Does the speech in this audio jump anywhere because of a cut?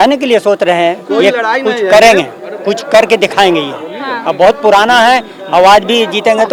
no; 0 cuts

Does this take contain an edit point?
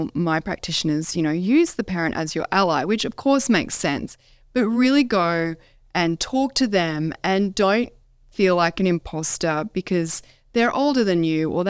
no; 0 cuts

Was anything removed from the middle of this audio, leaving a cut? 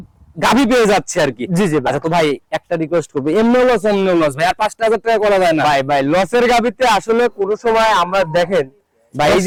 no; 0 cuts

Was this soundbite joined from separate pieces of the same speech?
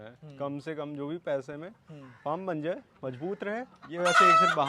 yes; 1 cut; at 3.8 s

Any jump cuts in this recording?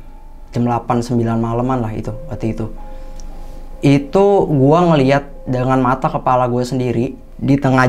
no; 0 cuts

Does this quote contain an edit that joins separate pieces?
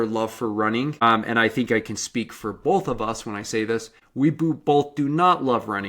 yes; 2 cuts; at 1.0 s, 4.0 s

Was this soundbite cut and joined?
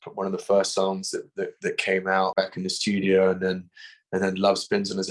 yes; 1 cut; at 2.3 s

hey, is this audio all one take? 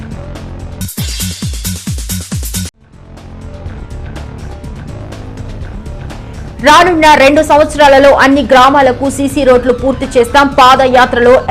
no; 3 cuts; at 0.8 s, 5.4 s, 6.6 s

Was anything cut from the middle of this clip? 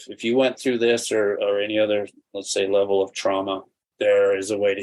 yes; 1 cut; at 3.8 s

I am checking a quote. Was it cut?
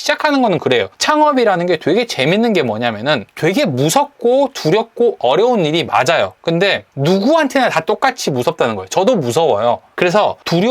yes; 3 cuts; at 0.9 s, 3.3 s, 6.9 s

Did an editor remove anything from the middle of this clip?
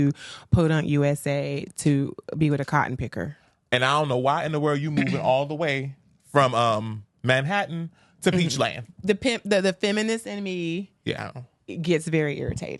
no; 0 cuts

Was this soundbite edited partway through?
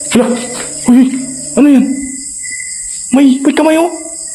no; 0 cuts

